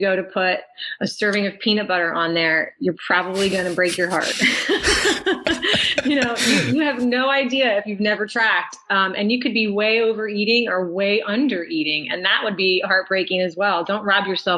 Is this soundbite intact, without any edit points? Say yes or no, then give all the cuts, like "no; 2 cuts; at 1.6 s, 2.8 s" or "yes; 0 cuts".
yes; 0 cuts